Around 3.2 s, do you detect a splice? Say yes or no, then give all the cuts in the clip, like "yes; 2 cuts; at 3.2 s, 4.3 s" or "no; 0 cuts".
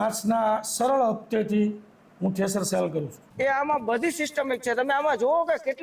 yes; 1 cut; at 3.2 s